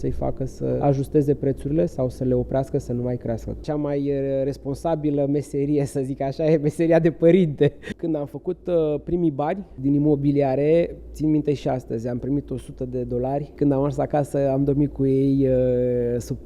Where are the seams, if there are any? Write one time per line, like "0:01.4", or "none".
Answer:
0:00.8
0:03.6
0:07.9
0:09.7
0:13.5